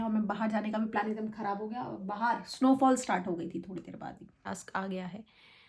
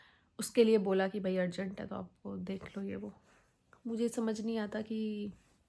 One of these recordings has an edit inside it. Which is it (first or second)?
first